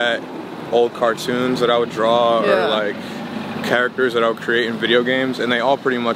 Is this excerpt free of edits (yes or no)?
yes